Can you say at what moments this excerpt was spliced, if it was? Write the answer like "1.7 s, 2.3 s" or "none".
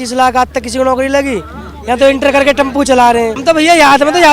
3.4 s